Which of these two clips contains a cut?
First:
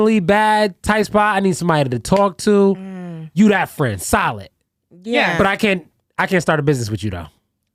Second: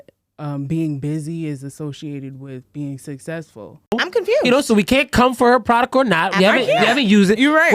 second; 1 cut; at 3.9 s

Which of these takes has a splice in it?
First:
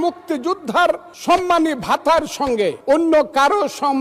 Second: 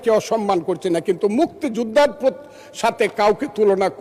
first; 2 cuts; at 1.1 s, 2.8 s

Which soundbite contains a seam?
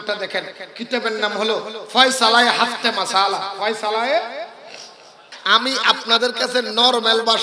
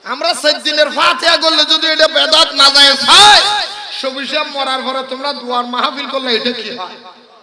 first; 1 cut; at 5.4 s

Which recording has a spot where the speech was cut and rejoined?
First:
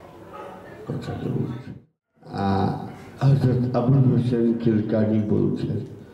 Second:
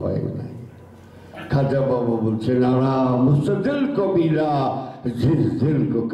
first; 1 cut; at 1.6 s

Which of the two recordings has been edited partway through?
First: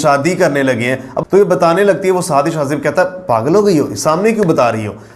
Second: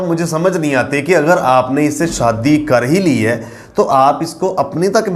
first; 1 cut; at 1.1 s

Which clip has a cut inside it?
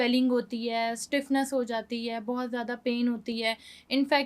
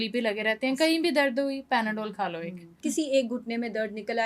second; 1 cut; at 2.8 s

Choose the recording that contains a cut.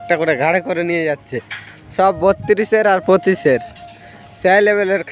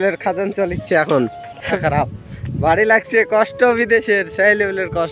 second; 1 cut; at 1.6 s

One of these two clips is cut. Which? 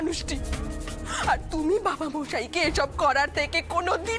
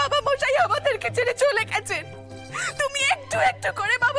second; 1 cut; at 2.2 s

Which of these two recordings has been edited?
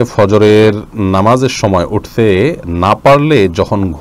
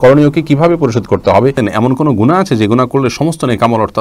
second; 1 cut; at 1.6 s

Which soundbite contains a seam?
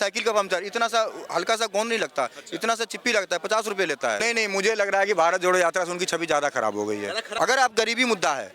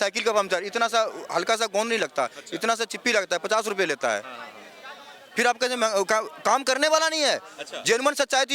first; 2 cuts; at 4.2 s, 7.2 s

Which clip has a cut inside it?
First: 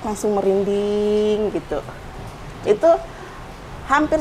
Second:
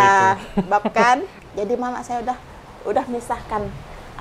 second; 1 cut; at 1.3 s

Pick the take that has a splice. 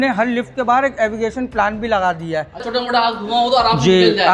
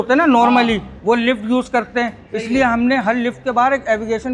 first; 1 cut; at 2.6 s

